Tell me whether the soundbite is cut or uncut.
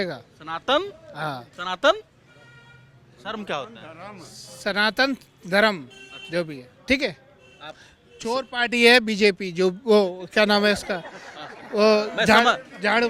uncut